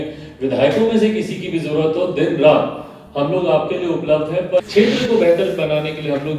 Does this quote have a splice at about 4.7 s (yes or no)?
yes